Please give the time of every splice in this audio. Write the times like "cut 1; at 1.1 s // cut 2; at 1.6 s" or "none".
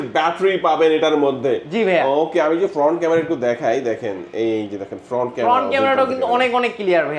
none